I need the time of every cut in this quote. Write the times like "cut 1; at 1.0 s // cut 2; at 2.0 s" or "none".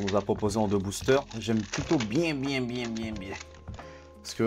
none